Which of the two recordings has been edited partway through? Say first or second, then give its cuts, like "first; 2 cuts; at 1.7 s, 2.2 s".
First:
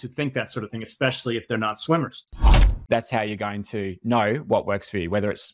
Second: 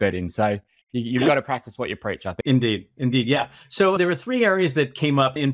first; 1 cut; at 2.7 s